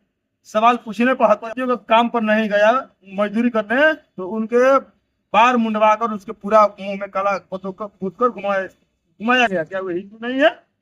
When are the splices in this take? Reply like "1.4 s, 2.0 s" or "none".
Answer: 1.4 s

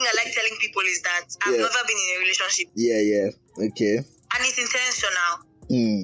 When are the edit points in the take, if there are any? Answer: 2.6 s

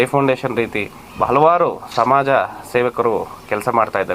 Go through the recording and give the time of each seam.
1.0 s

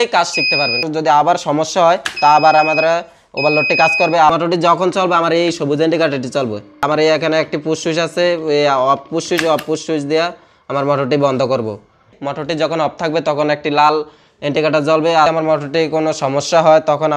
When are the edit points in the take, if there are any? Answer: 0.8 s, 4.3 s, 6.8 s, 12.2 s, 15.3 s

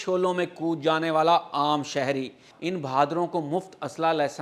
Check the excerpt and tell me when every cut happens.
2.5 s

